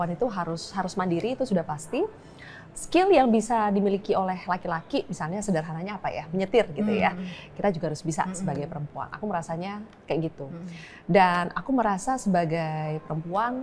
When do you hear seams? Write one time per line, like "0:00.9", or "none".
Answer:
none